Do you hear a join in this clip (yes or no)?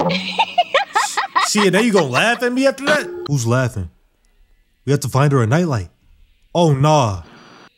yes